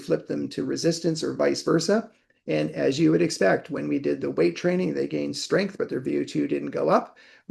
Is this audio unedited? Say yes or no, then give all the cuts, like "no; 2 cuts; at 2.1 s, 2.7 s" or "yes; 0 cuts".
yes; 0 cuts